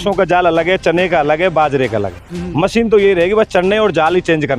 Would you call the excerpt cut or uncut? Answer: uncut